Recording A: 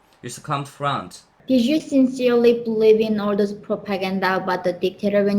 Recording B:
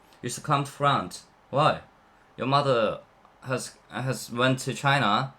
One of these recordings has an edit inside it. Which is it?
A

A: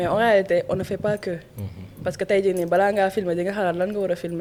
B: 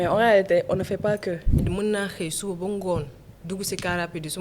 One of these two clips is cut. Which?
B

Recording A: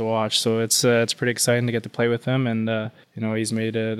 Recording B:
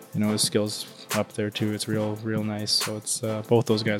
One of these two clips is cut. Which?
A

